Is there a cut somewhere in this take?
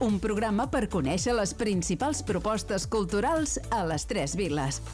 no; 0 cuts

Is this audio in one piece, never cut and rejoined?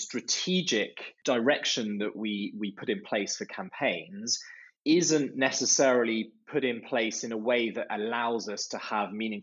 yes; 0 cuts

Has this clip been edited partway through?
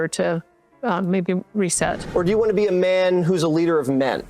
yes; 1 cut; at 2.0 s

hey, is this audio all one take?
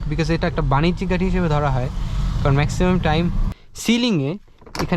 no; 1 cut; at 3.5 s

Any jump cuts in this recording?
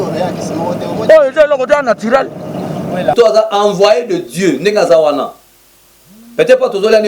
yes; 1 cut; at 3.1 s

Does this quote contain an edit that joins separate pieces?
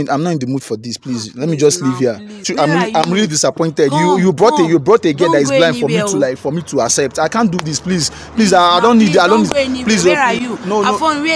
no; 0 cuts

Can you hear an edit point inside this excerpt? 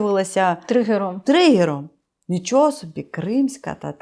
no; 0 cuts

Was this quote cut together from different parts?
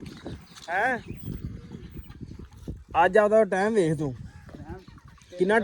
no; 0 cuts

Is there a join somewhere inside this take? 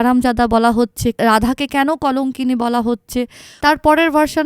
yes; 2 cuts; at 1.2 s, 3.4 s

